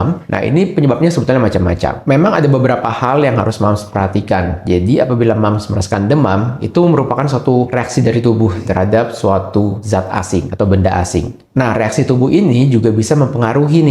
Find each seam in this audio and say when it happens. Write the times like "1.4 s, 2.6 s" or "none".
2.0 s, 7.7 s, 8.7 s, 10.1 s